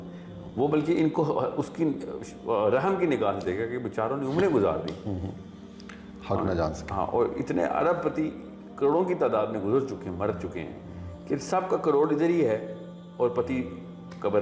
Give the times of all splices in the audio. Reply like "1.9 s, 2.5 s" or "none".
none